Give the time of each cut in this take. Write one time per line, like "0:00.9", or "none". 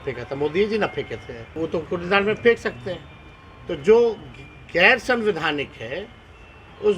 0:01.5